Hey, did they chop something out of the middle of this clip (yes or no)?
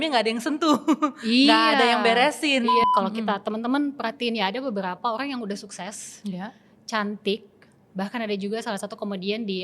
yes